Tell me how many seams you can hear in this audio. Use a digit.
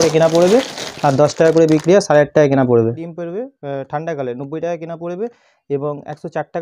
1